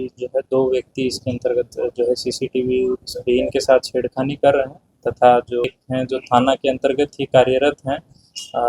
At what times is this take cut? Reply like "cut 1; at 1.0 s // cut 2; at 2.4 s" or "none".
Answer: cut 1; at 5.7 s

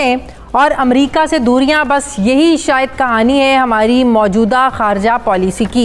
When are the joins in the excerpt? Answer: none

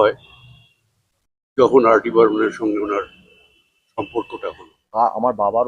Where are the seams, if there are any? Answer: cut 1; at 4.7 s

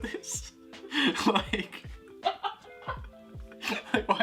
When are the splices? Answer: none

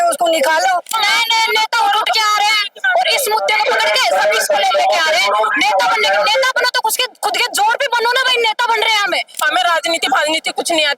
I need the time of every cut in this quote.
cut 1; at 1.0 s // cut 2; at 9.5 s

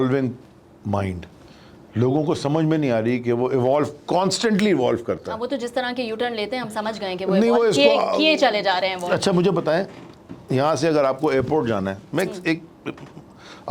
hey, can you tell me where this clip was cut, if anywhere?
none

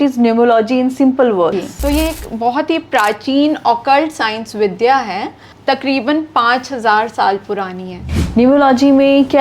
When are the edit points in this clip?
cut 1; at 1.5 s // cut 2; at 5.5 s // cut 3; at 8.0 s

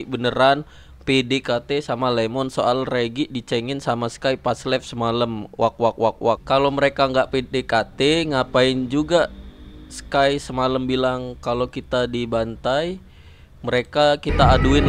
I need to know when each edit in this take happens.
cut 1; at 6.4 s

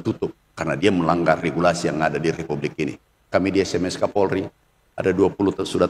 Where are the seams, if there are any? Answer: cut 1; at 3.2 s

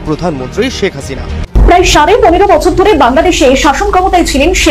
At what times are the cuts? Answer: cut 1; at 1.6 s

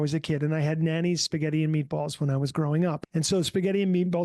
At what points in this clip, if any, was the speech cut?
cut 1; at 3.0 s

